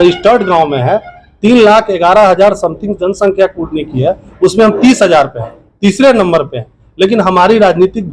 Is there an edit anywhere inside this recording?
no; 0 cuts

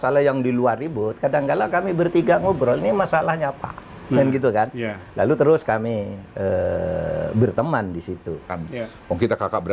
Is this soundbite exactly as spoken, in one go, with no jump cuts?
no; 1 cut; at 8.6 s

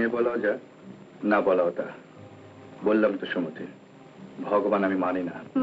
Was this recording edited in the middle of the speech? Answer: no; 0 cuts

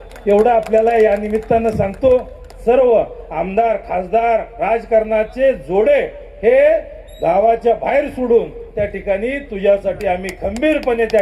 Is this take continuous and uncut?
no; 1 cut; at 2.6 s

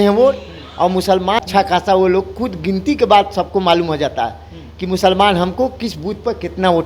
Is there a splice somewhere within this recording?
yes; 1 cut; at 1.4 s

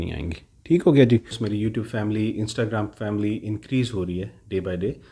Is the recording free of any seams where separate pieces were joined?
no; 1 cut; at 1.4 s

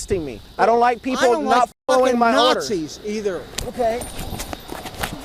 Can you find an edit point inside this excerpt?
no; 0 cuts

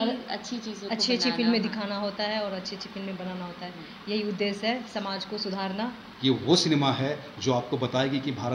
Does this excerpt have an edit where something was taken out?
yes; 1 cut; at 6.0 s

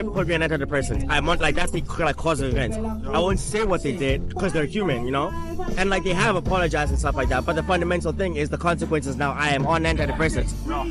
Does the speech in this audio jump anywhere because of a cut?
no; 0 cuts

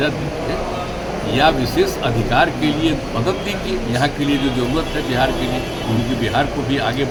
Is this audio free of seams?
yes; 0 cuts

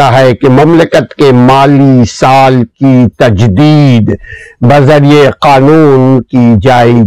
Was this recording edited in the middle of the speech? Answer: no; 0 cuts

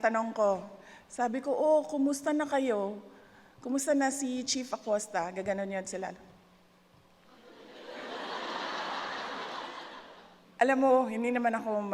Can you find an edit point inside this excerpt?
yes; 1 cut; at 10.0 s

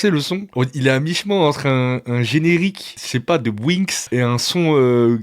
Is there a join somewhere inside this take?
yes; 2 cuts; at 3.0 s, 4.0 s

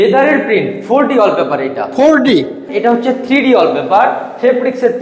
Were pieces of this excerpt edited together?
yes; 1 cut; at 2.7 s

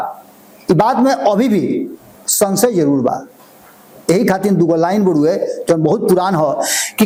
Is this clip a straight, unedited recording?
yes; 0 cuts

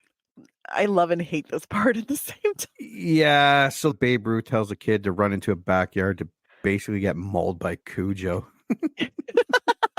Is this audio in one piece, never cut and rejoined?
no; 1 cut; at 3.9 s

